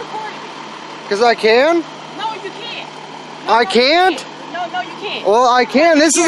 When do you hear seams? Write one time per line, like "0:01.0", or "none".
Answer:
none